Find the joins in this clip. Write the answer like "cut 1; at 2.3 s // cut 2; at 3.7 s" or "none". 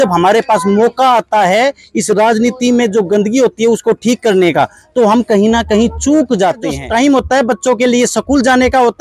cut 1; at 6.7 s